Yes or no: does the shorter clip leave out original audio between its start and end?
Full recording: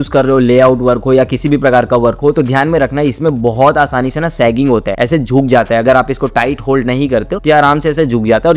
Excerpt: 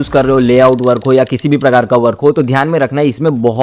no